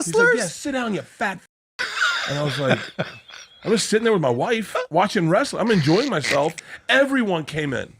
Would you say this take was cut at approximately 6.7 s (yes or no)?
yes